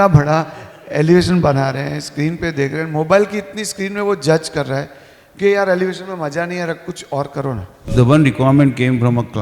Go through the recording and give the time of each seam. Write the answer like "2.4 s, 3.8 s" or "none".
7.8 s